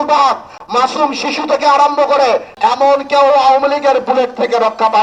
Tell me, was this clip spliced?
yes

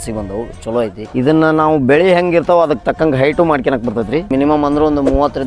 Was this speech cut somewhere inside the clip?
yes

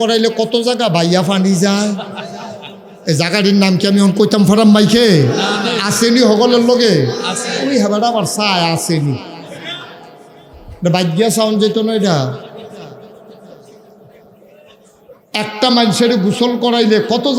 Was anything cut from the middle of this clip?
no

